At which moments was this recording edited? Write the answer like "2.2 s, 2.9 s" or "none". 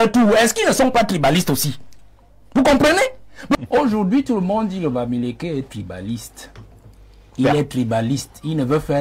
3.6 s